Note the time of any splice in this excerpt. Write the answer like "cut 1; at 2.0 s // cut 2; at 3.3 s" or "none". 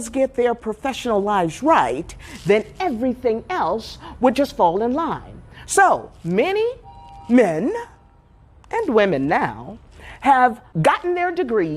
cut 1; at 10.6 s